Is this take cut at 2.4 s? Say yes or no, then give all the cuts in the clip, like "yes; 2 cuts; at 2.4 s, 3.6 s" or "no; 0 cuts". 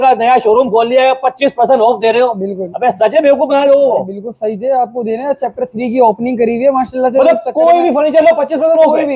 no; 0 cuts